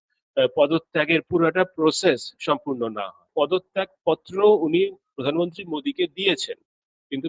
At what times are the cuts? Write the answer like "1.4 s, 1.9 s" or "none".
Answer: 3.2 s